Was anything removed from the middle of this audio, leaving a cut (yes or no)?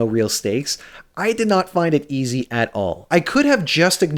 yes